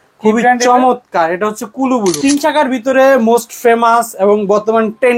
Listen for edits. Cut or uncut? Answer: cut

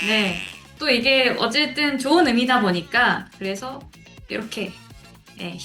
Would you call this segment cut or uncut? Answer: cut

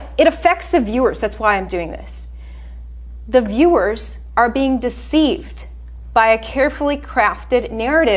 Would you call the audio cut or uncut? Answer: uncut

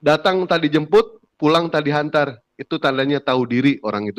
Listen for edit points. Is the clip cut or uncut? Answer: uncut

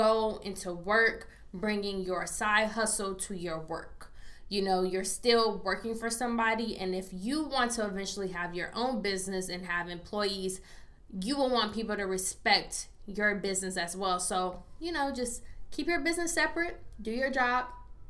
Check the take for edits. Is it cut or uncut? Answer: cut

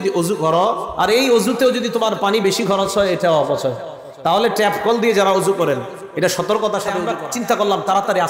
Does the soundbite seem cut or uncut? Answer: cut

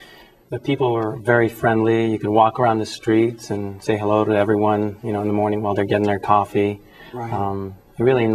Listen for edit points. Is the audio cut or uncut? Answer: cut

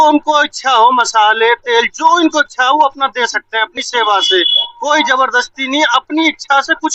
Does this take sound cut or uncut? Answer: uncut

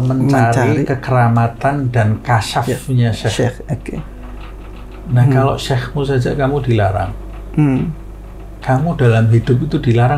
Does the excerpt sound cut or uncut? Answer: uncut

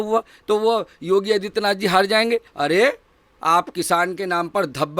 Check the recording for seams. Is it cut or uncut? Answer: cut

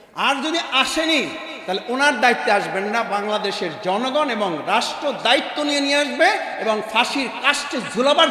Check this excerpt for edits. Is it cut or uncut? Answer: uncut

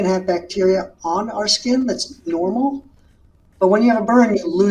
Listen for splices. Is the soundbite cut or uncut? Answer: uncut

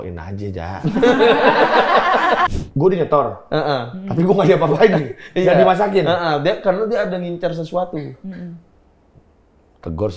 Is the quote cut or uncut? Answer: cut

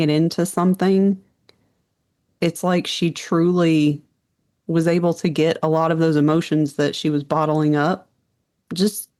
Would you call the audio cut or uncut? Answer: uncut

